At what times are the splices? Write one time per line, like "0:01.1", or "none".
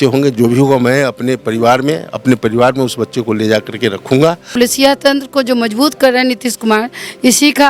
0:04.5

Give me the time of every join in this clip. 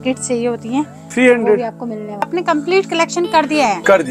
0:02.3

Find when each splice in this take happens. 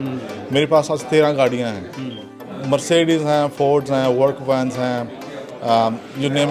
0:02.5

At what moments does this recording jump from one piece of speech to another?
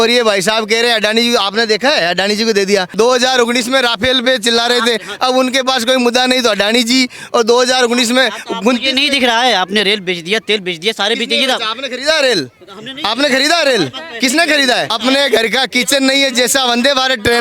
0:02.9
0:14.9

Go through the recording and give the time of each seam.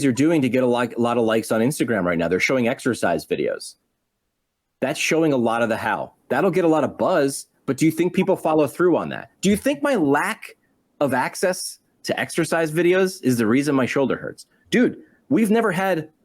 none

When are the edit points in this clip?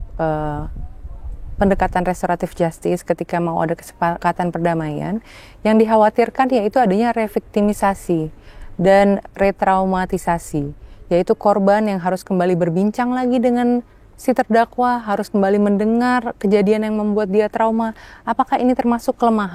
0:04.2

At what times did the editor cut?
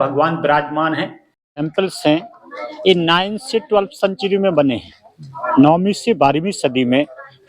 0:01.3

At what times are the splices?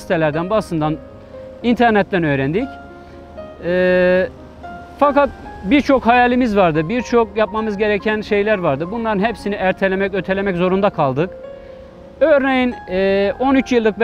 none

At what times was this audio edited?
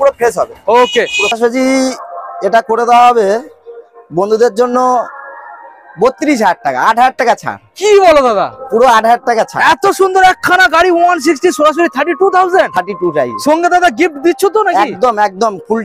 0:01.4

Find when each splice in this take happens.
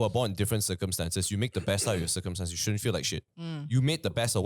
0:03.3

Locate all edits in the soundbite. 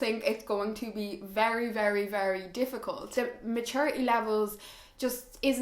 0:03.0

